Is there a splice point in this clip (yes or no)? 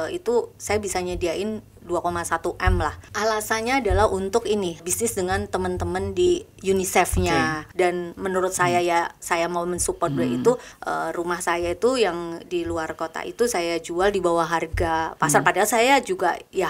yes